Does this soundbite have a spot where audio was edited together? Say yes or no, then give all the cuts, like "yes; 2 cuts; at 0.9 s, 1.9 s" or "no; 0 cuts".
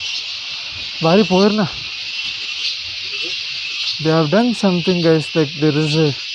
no; 0 cuts